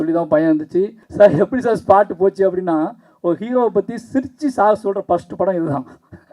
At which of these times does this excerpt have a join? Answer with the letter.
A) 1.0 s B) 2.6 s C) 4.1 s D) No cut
A